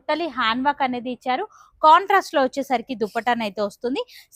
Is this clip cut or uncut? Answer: uncut